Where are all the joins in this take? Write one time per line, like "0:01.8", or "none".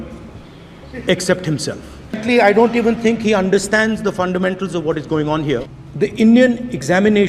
0:02.2
0:05.7